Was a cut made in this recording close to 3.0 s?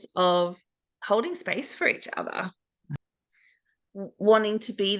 yes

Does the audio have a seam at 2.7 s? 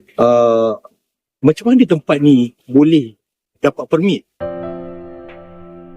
no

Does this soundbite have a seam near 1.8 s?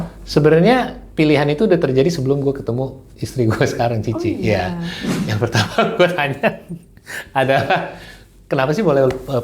no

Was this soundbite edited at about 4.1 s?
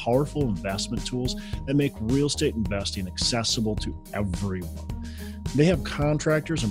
no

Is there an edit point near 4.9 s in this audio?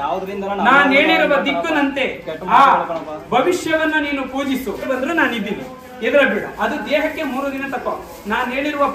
yes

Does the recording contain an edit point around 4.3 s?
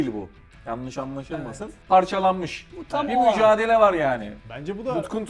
yes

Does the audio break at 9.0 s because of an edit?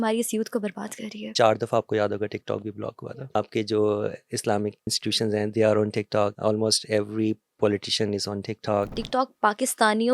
yes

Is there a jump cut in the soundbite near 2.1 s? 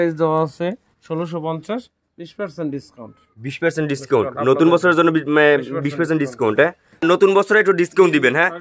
no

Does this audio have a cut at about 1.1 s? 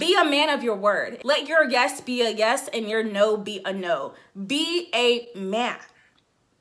yes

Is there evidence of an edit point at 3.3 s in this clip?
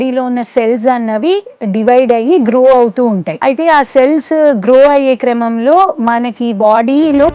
yes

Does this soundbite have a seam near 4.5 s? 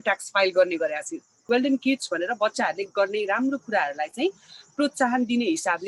no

